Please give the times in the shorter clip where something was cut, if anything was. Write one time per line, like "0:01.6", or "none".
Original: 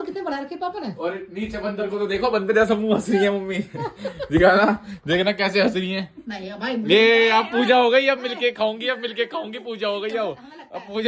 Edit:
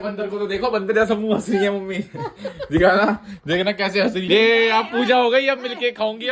0:04.2